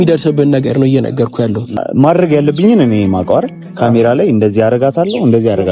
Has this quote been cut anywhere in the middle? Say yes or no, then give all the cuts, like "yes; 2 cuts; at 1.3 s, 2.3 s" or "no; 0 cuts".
yes; 1 cut; at 1.8 s